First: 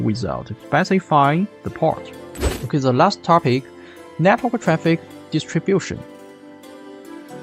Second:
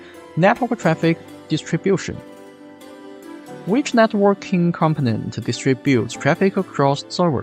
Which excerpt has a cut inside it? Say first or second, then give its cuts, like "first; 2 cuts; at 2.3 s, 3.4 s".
first; 1 cut; at 2.5 s